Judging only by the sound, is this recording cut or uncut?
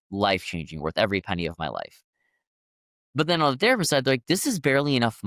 uncut